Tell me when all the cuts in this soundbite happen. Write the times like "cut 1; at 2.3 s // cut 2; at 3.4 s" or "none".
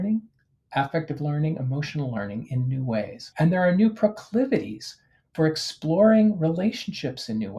cut 1; at 3.2 s